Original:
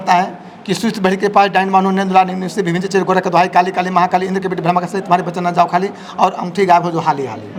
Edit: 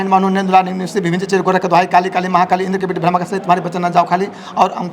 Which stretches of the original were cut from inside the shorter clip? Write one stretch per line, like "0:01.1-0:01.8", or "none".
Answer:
none